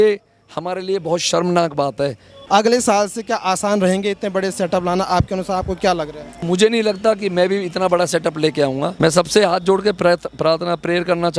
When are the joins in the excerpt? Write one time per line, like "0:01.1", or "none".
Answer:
0:02.3
0:06.4
0:08.9